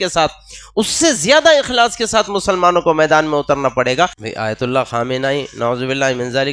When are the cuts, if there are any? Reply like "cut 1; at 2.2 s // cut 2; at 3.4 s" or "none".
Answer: cut 1; at 4.2 s